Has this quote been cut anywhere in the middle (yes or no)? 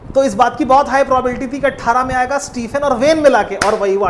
no